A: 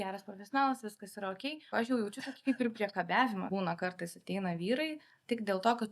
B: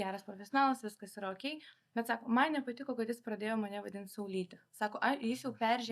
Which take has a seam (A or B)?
A